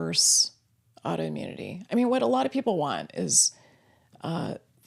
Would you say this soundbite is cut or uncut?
uncut